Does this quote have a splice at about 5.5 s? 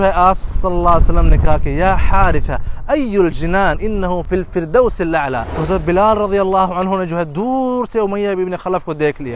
yes; 2 cuts; at 4.2 s, 5.5 s

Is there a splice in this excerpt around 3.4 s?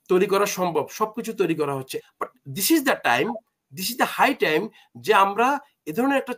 no; 1 cut; at 2.0 s

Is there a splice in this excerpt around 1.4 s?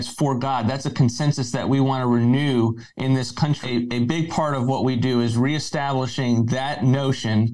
no; 1 cut; at 3.6 s

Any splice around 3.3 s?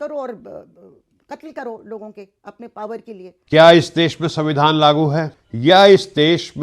yes; 1 cut; at 3.3 s

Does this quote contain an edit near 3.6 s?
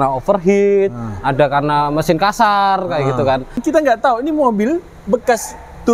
yes; 1 cut; at 3.6 s

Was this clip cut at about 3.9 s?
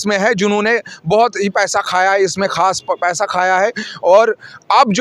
no; 0 cuts

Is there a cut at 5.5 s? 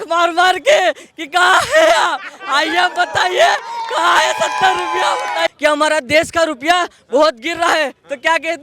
yes; 1 cut; at 5.5 s

